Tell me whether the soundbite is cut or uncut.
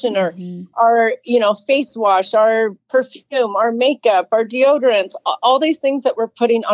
uncut